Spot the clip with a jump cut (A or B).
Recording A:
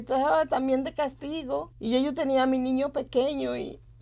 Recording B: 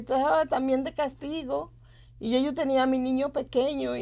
A